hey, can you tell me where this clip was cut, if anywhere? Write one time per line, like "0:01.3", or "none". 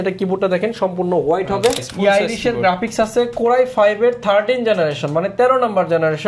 0:01.9